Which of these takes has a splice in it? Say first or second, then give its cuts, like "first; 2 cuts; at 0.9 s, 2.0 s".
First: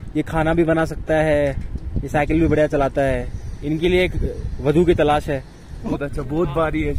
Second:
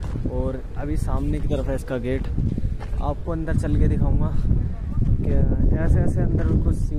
first; 1 cut; at 5.9 s